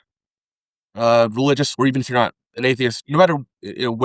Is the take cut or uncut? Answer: uncut